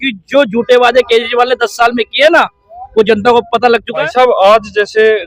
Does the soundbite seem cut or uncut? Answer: cut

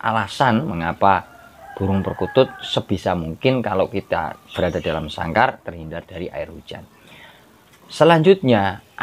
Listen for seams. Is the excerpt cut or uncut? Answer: uncut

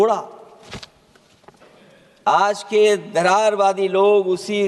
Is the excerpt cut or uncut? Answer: cut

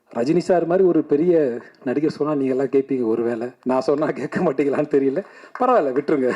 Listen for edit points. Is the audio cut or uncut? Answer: cut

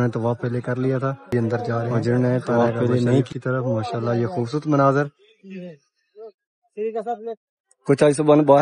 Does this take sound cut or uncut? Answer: cut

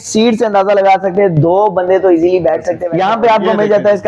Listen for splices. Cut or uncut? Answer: cut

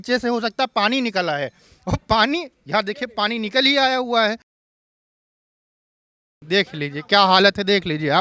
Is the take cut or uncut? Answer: uncut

